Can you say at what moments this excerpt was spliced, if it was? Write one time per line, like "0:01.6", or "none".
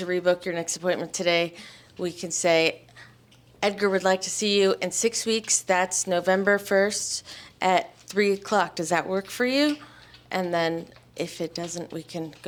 none